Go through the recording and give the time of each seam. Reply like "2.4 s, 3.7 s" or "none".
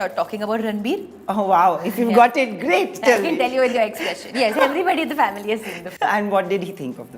none